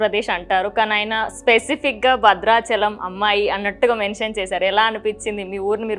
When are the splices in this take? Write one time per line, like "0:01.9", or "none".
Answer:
none